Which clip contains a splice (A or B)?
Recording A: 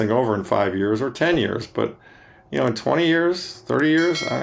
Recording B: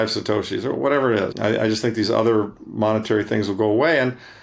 B